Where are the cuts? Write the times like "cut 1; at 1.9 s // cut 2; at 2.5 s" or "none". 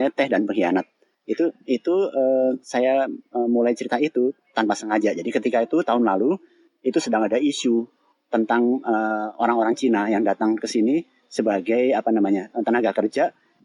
none